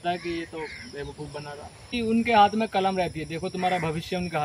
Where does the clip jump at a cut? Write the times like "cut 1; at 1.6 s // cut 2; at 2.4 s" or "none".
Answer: cut 1; at 1.9 s